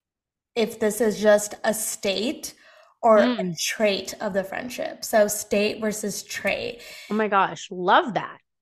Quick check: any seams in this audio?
no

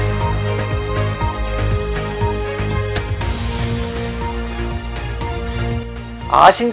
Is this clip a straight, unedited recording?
no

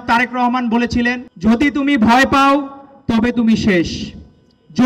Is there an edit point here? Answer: yes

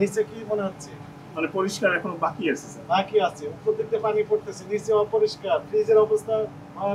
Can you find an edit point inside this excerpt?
no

